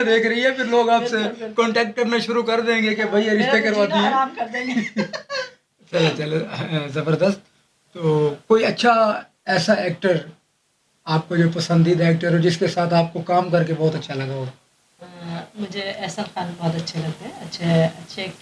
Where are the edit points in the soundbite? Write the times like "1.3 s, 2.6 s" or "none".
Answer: none